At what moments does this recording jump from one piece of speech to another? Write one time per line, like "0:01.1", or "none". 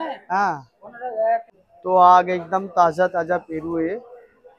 0:01.6